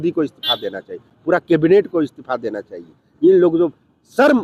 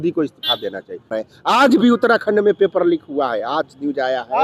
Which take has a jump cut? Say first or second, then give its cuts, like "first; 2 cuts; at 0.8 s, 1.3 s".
second; 1 cut; at 1.1 s